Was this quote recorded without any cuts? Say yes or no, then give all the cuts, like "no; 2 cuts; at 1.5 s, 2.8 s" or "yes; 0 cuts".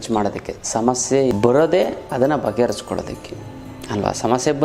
no; 1 cut; at 1.3 s